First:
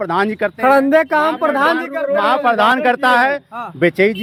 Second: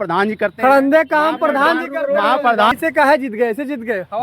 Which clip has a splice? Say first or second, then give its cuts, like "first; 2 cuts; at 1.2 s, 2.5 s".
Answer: second; 1 cut; at 2.7 s